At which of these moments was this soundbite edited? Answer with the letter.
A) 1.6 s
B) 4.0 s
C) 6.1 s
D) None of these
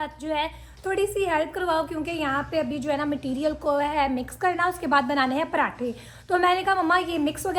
D